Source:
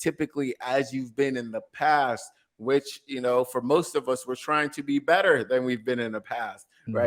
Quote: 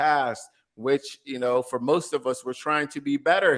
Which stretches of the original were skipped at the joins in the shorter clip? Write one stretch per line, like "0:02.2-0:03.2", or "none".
none